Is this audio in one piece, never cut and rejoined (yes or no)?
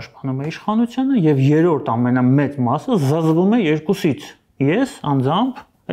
yes